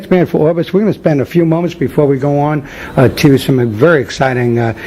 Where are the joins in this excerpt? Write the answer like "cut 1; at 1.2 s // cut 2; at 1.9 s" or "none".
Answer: cut 1; at 2.5 s